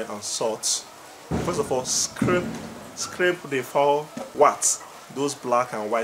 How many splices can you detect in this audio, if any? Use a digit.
0